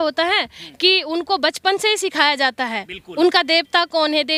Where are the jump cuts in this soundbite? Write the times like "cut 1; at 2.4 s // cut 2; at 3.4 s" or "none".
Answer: none